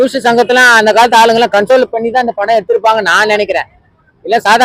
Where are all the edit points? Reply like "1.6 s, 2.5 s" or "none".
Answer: none